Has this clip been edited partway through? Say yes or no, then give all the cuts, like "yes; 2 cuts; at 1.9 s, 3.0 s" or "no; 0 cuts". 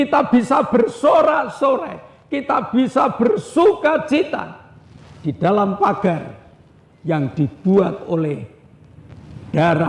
no; 0 cuts